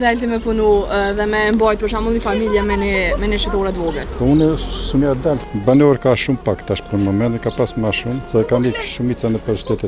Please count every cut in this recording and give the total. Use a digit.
3